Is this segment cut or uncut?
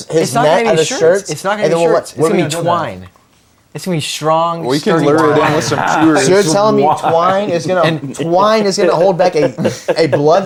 uncut